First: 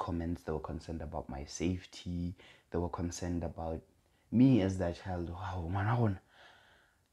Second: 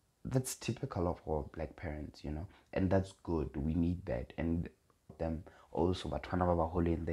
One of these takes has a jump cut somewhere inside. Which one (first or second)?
second